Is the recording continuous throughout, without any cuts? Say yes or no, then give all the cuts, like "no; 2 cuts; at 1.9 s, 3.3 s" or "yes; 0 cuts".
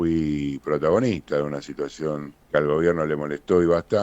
no; 1 cut; at 2.3 s